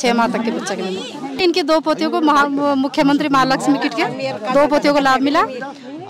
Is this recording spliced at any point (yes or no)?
yes